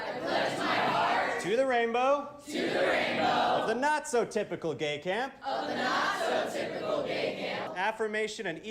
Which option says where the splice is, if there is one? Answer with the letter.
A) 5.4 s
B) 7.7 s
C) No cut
B